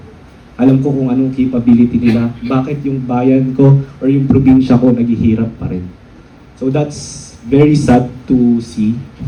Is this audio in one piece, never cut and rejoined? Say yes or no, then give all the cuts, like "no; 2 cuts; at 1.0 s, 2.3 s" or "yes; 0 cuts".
yes; 0 cuts